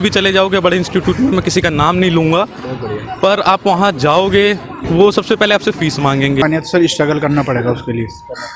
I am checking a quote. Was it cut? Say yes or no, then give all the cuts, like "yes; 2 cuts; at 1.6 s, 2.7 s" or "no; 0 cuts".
yes; 2 cuts; at 4.7 s, 6.4 s